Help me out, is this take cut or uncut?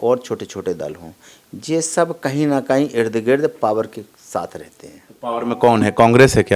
cut